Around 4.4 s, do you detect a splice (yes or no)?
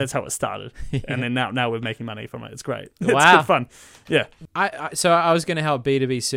yes